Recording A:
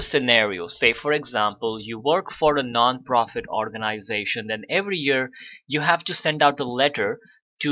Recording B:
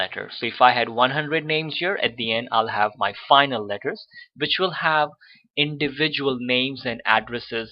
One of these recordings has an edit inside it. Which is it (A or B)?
A